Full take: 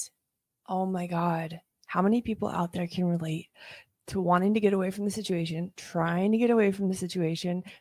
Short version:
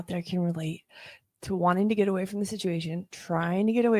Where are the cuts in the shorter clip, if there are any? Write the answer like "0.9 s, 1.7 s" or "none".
none